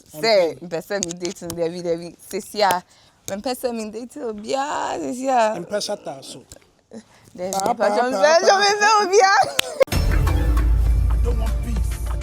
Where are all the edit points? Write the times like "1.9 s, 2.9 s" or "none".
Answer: 9.8 s